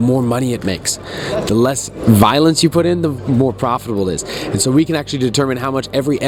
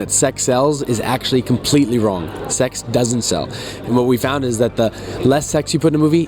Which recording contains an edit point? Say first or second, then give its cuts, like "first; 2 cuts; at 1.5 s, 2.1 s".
second; 1 cut; at 3.8 s